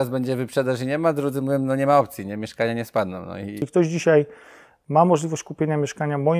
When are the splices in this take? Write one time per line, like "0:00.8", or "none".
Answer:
0:03.7